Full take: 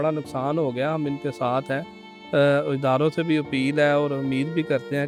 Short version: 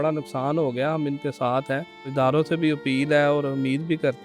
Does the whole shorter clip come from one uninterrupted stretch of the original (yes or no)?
no